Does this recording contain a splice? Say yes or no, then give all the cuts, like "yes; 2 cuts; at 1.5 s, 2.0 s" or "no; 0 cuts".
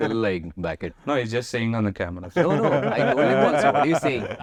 no; 0 cuts